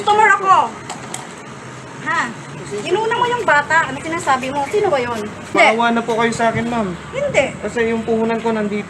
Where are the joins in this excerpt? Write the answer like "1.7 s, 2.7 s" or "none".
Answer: 5.5 s